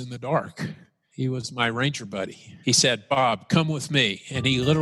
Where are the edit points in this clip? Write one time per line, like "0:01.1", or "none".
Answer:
0:01.1
0:02.5